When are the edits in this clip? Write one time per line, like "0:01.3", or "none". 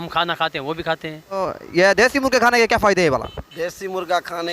0:01.2